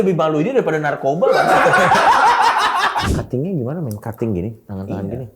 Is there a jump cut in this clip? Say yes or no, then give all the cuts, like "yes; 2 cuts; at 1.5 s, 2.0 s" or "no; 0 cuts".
yes; 1 cut; at 3.1 s